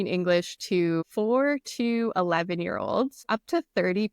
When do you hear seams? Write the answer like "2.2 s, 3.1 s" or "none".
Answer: 1.1 s, 3.2 s